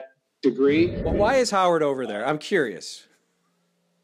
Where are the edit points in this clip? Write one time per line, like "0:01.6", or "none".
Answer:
0:01.0